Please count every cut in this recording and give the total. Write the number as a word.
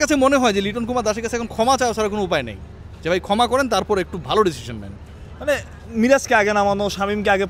zero